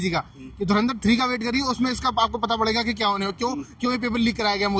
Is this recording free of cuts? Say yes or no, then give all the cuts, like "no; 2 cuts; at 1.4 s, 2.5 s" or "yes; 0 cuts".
yes; 0 cuts